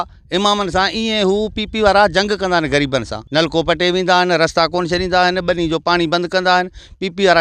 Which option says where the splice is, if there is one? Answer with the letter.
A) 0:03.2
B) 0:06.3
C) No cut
A